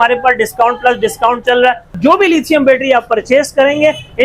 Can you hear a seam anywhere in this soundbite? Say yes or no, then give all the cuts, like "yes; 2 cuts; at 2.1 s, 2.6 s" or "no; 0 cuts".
yes; 1 cut; at 1.9 s